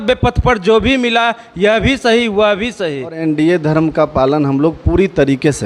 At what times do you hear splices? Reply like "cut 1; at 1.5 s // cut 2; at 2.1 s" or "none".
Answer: cut 1; at 3.2 s